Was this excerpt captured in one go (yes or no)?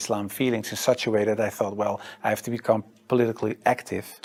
yes